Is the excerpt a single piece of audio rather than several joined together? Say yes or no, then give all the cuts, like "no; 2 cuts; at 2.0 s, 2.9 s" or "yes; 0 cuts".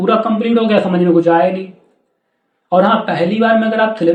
yes; 0 cuts